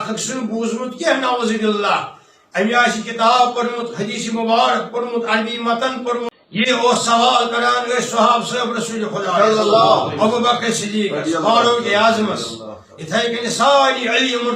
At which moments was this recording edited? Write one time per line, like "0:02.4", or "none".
0:06.3